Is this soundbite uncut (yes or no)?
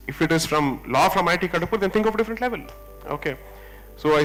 yes